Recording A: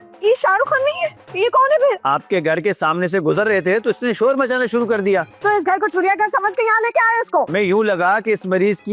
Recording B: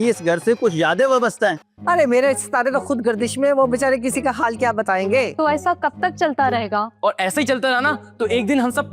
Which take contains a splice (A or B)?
B